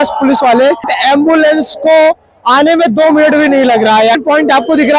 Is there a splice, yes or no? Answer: yes